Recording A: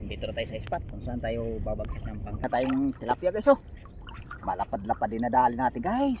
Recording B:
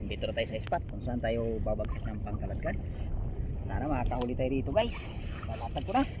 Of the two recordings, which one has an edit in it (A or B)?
A